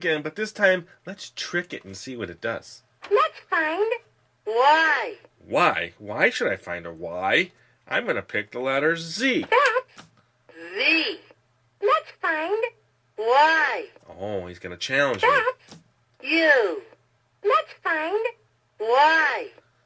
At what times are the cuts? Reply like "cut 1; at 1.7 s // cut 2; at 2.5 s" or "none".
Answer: cut 1; at 2.0 s